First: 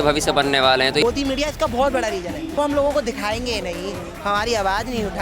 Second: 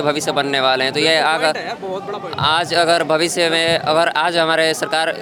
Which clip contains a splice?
first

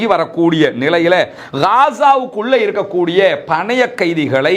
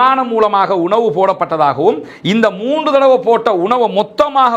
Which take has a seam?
first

